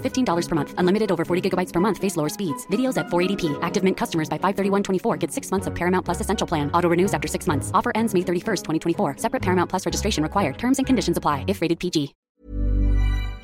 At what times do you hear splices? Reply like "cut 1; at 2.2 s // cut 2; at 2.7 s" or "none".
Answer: cut 1; at 12.2 s